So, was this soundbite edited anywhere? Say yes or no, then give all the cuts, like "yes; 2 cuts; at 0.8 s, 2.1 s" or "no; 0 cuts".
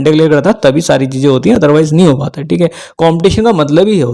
no; 0 cuts